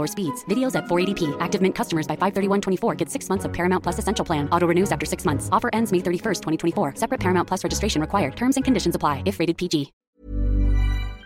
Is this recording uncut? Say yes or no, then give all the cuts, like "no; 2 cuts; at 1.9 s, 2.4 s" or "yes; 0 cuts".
no; 1 cut; at 10.1 s